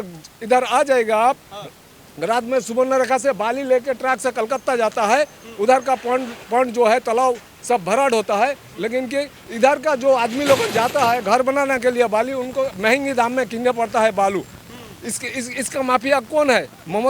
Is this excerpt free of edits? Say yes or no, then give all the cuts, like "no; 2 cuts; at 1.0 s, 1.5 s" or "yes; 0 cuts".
yes; 0 cuts